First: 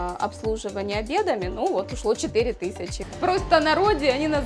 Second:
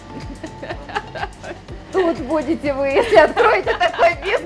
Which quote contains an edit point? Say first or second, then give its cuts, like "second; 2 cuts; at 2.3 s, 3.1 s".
first; 1 cut; at 3.0 s